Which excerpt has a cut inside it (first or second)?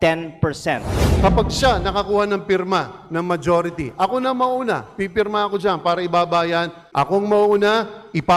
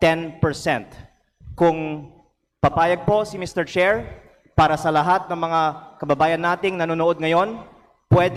first